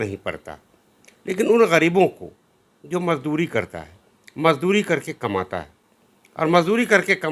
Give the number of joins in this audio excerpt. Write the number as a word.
zero